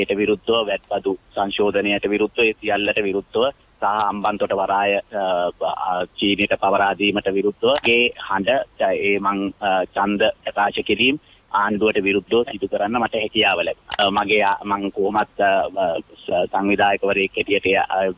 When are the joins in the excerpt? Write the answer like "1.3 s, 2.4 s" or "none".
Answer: 7.8 s, 14.0 s